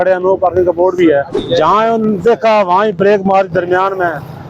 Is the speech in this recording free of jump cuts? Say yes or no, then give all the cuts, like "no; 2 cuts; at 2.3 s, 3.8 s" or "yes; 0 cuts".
no; 1 cut; at 1.3 s